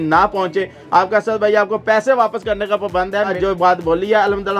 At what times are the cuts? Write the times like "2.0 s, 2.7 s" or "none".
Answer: 3.3 s